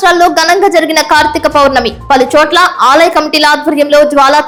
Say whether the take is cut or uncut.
uncut